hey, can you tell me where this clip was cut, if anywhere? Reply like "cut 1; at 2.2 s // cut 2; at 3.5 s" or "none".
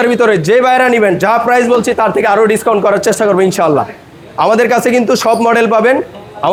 none